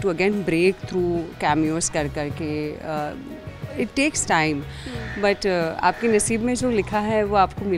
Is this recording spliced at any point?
no; 0 cuts

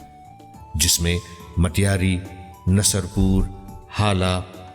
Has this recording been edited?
no; 0 cuts

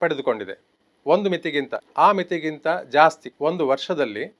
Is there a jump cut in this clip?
yes; 2 cuts; at 1.8 s, 3.3 s

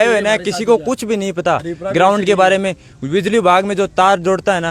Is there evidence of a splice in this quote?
no; 0 cuts

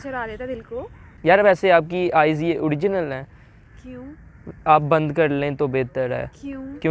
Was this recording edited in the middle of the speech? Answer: yes; 1 cut; at 1.0 s

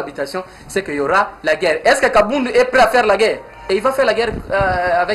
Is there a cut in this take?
no; 0 cuts

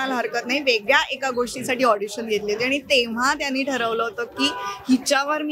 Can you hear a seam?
no; 0 cuts

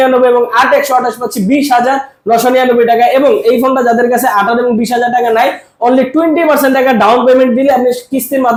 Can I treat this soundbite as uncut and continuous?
yes; 0 cuts

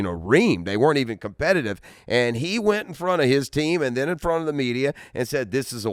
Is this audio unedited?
yes; 0 cuts

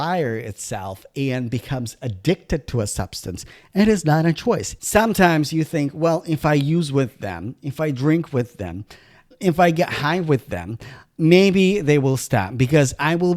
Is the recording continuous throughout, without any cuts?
no; 1 cut; at 4.7 s

